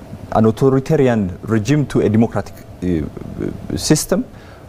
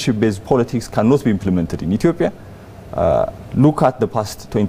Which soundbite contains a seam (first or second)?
second